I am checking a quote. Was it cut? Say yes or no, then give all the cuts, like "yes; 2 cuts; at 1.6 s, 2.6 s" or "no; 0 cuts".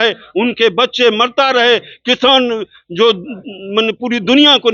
no; 0 cuts